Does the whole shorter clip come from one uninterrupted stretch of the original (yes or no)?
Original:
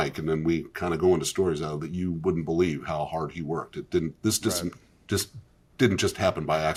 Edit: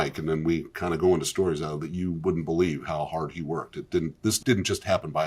no